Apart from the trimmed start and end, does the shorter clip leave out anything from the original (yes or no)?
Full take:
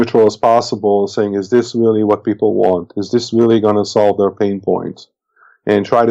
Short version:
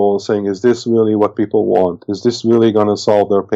no